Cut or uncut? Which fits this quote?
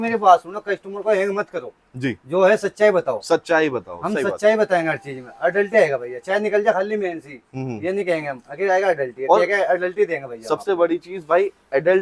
uncut